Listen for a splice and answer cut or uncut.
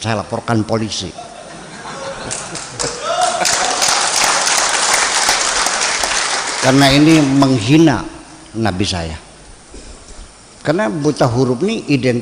uncut